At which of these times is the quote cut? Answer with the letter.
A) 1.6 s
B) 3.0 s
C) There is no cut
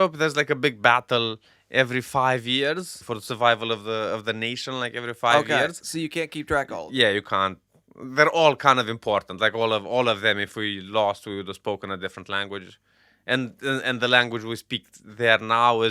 B